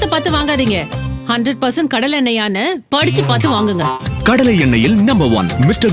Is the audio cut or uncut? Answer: uncut